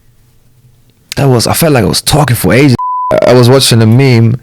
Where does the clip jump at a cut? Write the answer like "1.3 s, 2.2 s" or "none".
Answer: 2.8 s